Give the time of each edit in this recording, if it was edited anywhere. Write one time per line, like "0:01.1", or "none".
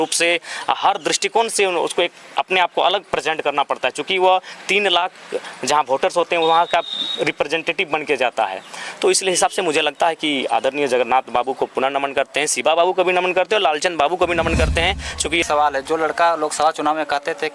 0:15.4